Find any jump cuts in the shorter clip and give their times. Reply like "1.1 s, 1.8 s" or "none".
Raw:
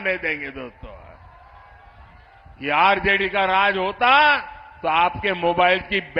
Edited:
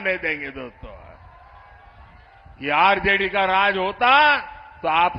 none